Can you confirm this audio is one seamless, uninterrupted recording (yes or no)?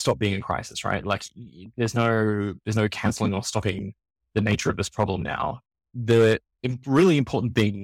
no